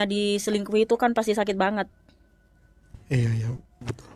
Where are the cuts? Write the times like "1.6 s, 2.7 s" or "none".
none

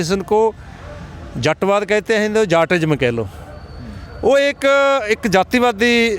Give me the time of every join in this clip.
none

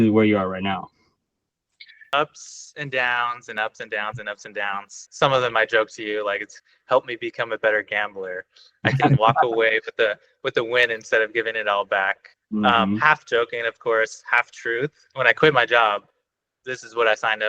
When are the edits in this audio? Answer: 5.0 s, 15.1 s

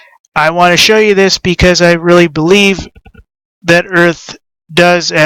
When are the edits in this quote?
2.9 s

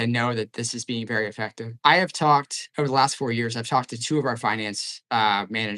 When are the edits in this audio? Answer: 1.6 s

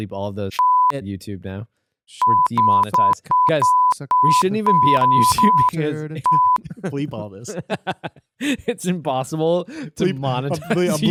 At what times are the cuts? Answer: none

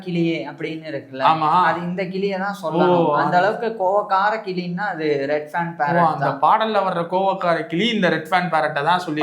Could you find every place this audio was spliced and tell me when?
none

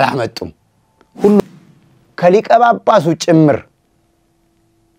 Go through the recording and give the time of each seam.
1.4 s

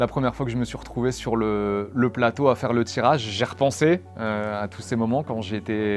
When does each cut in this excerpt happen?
none

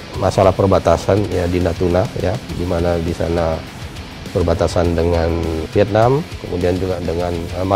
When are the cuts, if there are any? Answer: 5.7 s

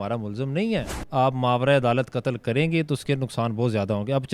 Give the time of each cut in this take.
1.0 s

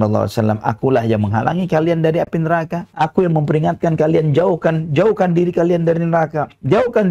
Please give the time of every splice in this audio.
none

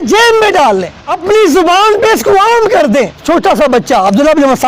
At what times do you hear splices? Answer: 1.0 s, 3.2 s

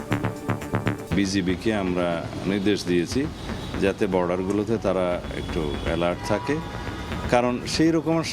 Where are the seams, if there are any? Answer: 1.0 s

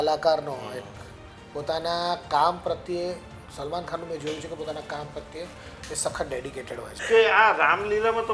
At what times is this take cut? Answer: 7.0 s

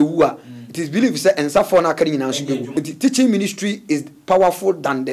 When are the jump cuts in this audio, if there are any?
2.7 s

